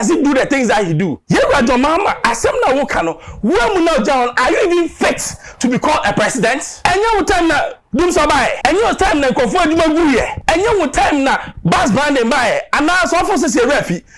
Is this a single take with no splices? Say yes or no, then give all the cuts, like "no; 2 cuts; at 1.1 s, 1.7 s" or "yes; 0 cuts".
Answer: no; 4 cuts; at 1.2 s, 6.7 s, 8.6 s, 10.3 s